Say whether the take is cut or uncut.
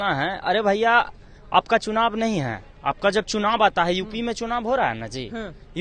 uncut